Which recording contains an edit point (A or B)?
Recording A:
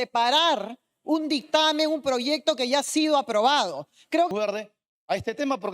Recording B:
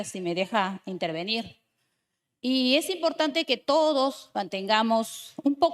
A